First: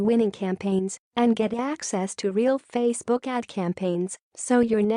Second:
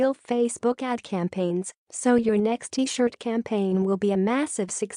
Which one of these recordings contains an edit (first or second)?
first